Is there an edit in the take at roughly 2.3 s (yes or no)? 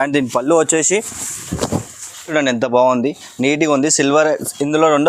yes